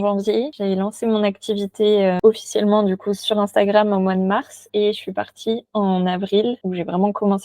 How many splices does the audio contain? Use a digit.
2